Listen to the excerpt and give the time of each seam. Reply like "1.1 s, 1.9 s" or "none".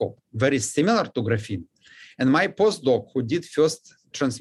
none